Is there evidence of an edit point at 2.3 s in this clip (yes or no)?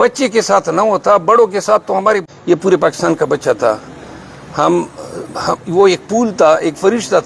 yes